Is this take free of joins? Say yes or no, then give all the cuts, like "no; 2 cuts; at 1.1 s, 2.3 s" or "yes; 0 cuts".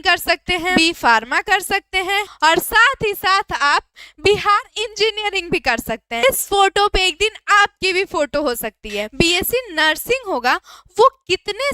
no; 4 cuts; at 0.7 s, 2.3 s, 6.2 s, 9.1 s